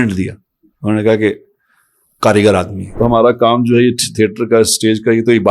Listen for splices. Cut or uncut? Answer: cut